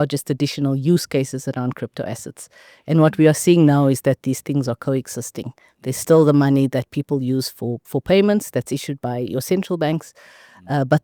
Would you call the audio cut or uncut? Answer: uncut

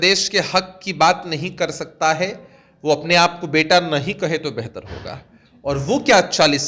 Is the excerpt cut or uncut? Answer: uncut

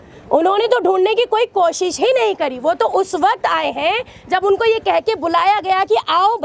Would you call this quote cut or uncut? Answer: uncut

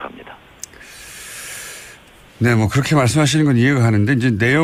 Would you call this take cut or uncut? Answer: uncut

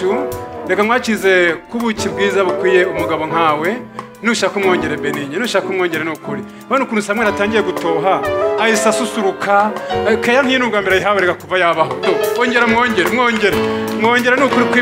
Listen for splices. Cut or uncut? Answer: uncut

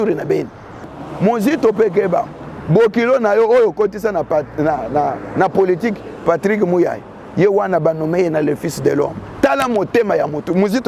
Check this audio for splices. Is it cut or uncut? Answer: cut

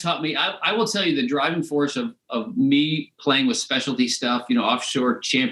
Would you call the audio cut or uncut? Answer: uncut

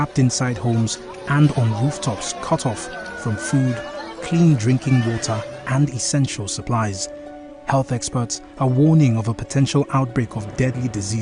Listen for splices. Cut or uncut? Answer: uncut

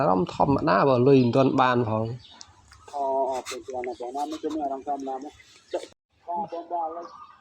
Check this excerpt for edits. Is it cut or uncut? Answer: cut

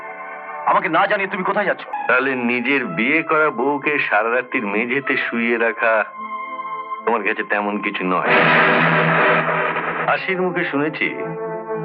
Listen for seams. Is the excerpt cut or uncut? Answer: cut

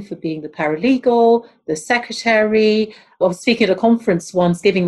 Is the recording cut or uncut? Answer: cut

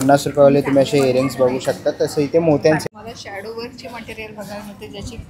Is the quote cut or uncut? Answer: cut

